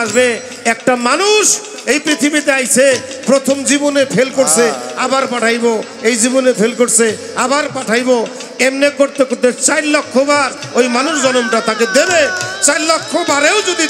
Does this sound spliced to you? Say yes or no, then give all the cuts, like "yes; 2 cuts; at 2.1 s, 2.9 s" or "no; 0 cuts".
no; 0 cuts